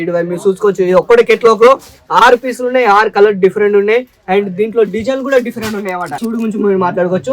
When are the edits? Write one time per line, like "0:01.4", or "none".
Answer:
0:06.2